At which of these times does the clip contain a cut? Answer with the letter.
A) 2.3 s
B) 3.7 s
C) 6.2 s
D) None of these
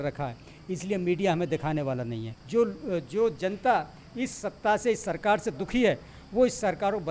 A